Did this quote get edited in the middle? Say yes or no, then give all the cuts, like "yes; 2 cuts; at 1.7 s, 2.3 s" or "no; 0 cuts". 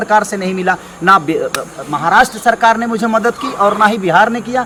no; 0 cuts